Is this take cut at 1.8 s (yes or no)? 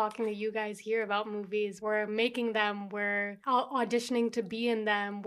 yes